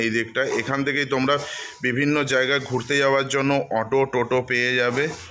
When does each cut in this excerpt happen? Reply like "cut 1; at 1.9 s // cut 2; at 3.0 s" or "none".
none